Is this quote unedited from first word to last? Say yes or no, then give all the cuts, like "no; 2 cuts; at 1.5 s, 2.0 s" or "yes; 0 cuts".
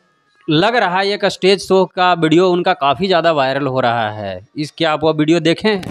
yes; 0 cuts